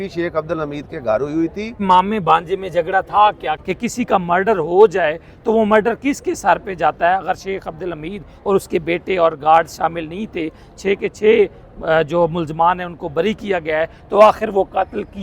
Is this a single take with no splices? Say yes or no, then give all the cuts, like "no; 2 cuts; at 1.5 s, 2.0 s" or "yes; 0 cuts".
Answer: no; 2 cuts; at 1.8 s, 3.7 s